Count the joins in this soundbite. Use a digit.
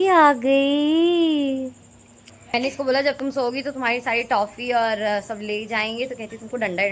1